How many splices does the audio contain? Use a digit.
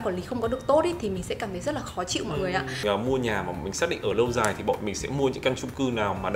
1